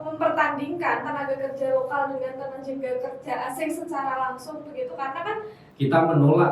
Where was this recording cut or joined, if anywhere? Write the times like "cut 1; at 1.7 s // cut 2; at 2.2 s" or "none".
cut 1; at 5.6 s